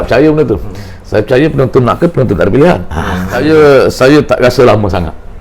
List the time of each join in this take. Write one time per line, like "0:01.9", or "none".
0:03.4